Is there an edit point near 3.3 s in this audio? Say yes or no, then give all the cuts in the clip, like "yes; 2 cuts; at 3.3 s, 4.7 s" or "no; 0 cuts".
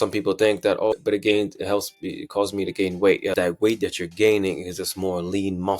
yes; 1 cut; at 3.3 s